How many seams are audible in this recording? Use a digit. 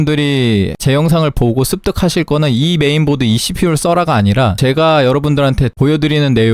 1